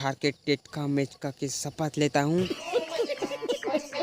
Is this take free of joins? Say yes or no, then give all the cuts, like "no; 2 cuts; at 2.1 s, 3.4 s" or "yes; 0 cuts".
no; 1 cut; at 2.6 s